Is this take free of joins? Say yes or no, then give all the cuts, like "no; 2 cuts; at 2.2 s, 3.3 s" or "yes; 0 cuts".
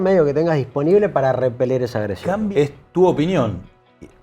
no; 1 cut; at 2.4 s